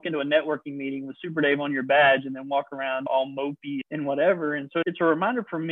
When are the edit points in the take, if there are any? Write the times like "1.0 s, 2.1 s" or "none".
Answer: none